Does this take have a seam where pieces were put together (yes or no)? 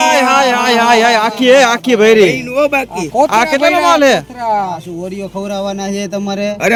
no